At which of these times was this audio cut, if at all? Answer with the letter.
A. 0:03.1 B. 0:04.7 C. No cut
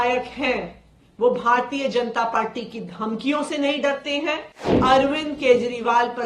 B